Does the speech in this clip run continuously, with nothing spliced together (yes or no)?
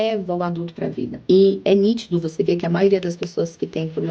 no